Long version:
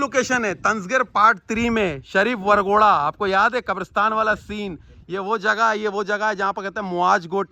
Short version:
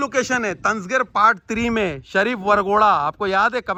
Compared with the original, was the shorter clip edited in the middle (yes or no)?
no